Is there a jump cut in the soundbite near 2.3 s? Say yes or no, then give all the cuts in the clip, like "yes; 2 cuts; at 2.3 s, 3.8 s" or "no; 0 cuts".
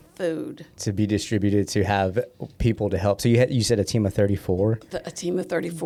no; 0 cuts